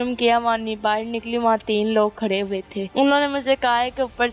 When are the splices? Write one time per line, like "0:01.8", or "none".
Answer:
0:02.8

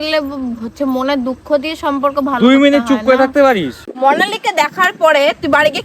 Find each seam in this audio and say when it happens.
0:03.8

